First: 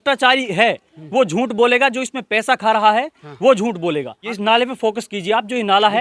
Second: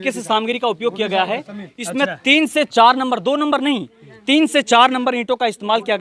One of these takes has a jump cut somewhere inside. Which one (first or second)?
first